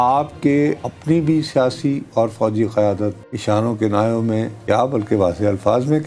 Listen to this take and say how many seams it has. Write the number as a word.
three